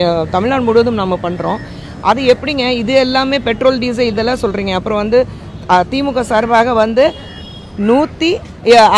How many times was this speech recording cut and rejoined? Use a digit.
0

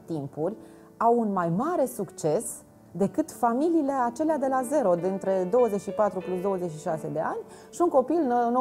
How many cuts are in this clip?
0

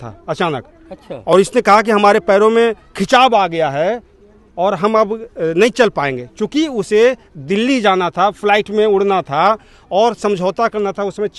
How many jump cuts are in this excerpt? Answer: 0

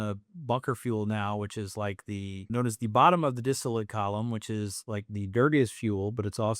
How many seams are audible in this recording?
1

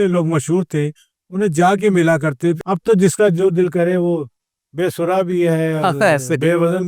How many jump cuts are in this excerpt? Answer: 1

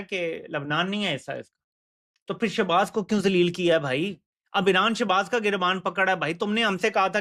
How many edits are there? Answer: 0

